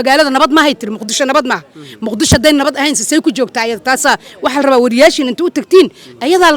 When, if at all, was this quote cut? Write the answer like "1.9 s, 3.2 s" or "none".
none

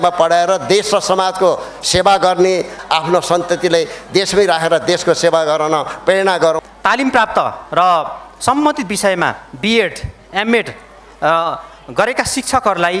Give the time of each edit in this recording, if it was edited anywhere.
2.8 s, 6.6 s

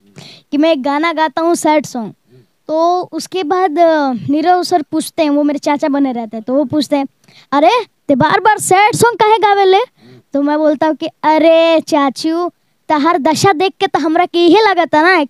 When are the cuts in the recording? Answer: none

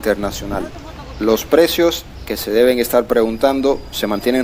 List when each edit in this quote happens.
none

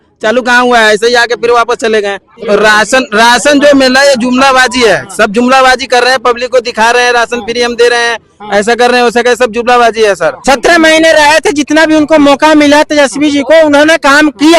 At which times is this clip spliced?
2.3 s, 10.4 s

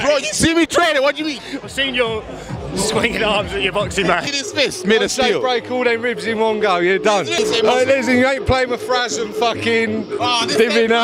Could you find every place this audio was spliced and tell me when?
4.4 s, 7.3 s

